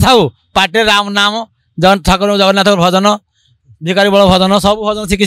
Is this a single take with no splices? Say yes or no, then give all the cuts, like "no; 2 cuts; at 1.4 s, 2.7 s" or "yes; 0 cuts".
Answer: yes; 0 cuts